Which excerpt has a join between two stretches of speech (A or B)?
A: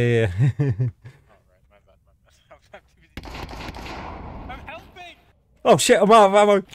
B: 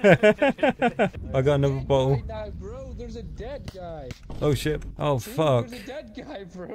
B